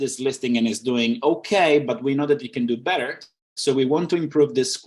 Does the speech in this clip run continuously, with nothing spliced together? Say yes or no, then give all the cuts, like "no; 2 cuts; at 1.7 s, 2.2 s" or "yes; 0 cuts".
yes; 0 cuts